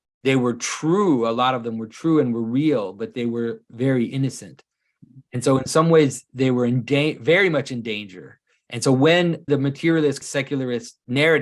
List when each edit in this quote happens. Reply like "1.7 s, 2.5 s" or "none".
9.4 s, 10.5 s